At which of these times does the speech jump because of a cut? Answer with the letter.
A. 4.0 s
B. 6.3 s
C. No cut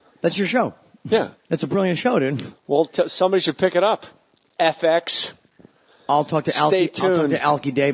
B